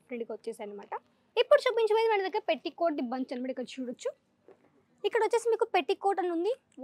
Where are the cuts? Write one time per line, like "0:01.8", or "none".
0:01.2